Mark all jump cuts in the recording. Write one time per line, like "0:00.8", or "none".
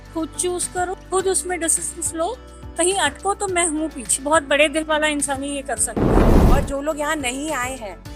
0:01.0
0:04.2
0:05.9
0:06.5